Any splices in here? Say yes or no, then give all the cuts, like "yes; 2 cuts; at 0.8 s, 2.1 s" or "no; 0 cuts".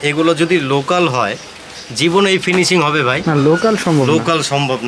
no; 0 cuts